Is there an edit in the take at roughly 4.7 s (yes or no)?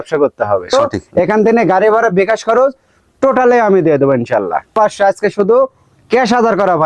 yes